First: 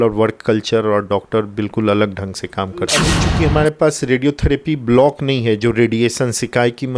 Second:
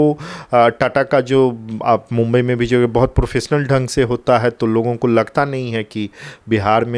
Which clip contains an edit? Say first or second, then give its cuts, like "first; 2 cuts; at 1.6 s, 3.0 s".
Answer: first; 1 cut; at 3.1 s